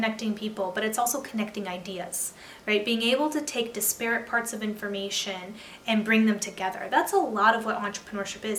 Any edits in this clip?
no; 0 cuts

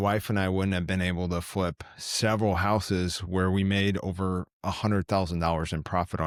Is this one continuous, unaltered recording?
yes; 0 cuts

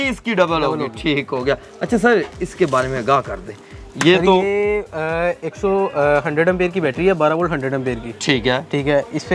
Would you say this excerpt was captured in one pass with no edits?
yes; 0 cuts

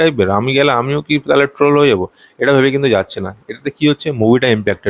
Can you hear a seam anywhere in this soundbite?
no; 0 cuts

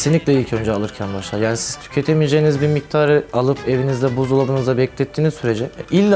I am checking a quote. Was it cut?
no; 0 cuts

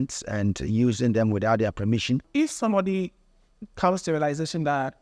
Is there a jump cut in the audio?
yes; 1 cut; at 2.3 s

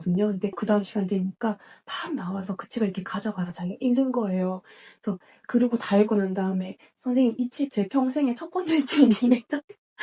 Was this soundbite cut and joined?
no; 0 cuts

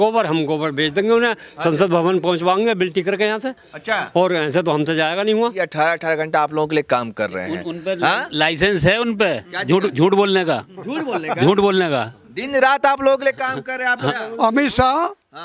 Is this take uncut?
no; 2 cuts; at 5.6 s, 13.9 s

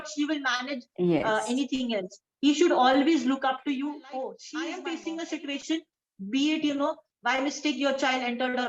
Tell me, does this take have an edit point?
yes; 1 cut; at 4.7 s

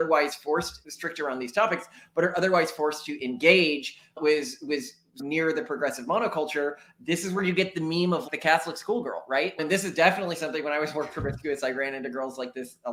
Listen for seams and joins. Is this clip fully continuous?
yes; 0 cuts

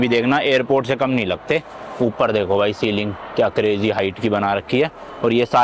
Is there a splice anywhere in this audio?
no; 0 cuts

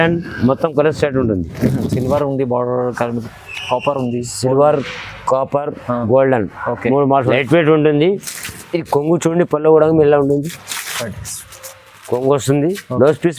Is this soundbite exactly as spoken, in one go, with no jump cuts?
no; 1 cut; at 7.3 s

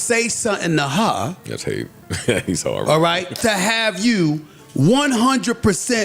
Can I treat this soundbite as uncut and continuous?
yes; 0 cuts

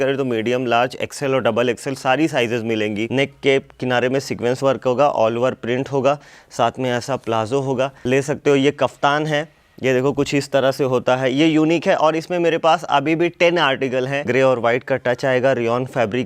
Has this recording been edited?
yes; 3 cuts; at 3.1 s, 8.0 s, 14.3 s

